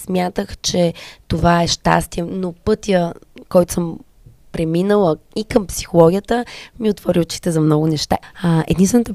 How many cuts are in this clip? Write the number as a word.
one